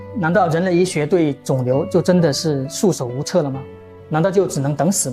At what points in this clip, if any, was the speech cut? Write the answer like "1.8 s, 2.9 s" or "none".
none